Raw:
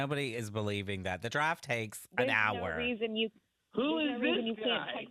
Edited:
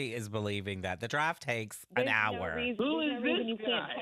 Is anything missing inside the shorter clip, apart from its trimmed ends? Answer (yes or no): yes